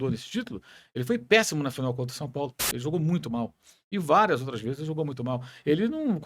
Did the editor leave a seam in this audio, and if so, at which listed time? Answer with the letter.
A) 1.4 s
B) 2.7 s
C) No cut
B